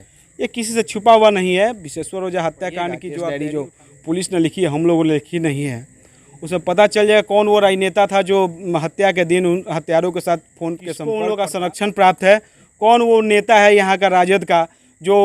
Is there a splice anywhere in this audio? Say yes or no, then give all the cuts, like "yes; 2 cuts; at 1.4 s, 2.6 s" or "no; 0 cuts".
yes; 2 cuts; at 3.1 s, 10.9 s